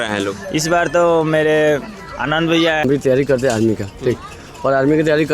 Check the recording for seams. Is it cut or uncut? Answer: cut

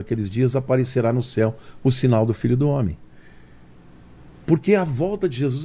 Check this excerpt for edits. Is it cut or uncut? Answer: uncut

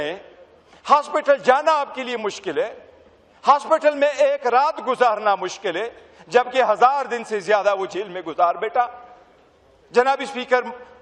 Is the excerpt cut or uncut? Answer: uncut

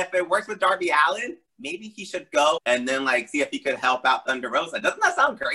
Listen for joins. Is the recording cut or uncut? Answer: cut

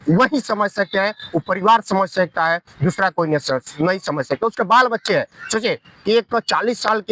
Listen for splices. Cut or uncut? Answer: uncut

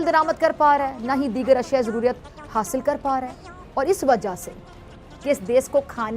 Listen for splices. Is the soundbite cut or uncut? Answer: cut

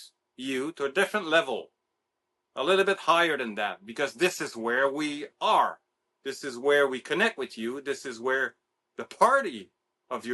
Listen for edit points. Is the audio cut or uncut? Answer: uncut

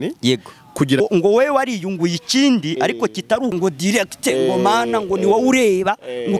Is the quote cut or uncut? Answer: cut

